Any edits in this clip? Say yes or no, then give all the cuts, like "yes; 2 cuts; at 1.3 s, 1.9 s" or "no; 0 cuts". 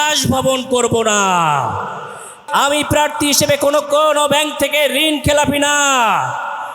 yes; 1 cut; at 2.4 s